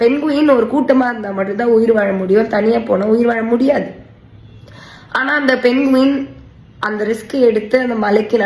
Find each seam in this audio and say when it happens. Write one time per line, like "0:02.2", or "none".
none